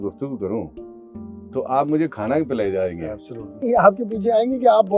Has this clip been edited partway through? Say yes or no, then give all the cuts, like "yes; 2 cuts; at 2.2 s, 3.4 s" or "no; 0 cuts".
yes; 1 cut; at 3.6 s